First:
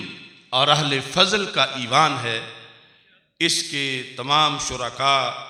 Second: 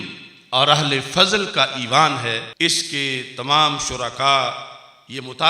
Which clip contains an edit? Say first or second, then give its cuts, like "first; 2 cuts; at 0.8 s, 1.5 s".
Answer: second; 1 cut; at 2.5 s